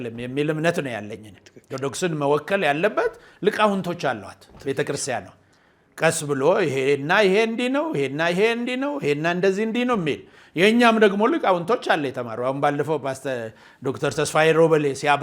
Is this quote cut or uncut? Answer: uncut